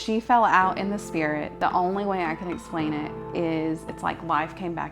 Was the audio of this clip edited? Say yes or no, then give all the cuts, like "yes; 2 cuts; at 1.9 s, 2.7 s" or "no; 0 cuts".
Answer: no; 0 cuts